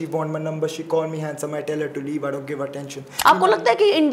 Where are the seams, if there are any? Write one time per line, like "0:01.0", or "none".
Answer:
0:03.1